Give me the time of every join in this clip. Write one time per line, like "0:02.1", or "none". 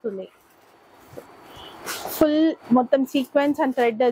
none

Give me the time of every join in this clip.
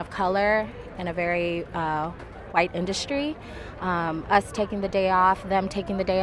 none

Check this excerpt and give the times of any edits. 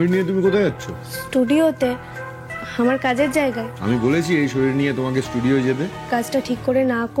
0:03.7
0:06.1

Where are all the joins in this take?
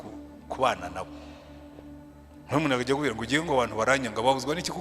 0:01.0
0:02.5

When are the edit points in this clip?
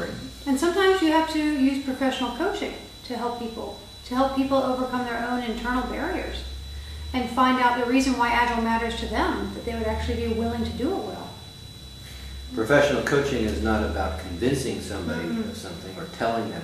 0:11.5

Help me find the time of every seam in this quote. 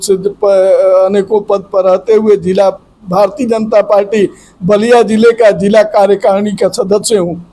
none

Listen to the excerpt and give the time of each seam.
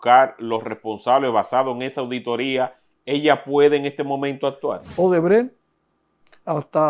0:04.9

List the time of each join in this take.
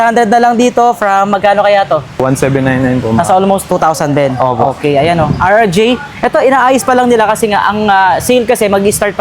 0:02.2
0:03.6

